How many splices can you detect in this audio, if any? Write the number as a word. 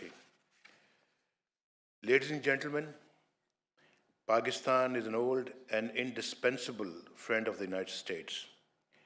zero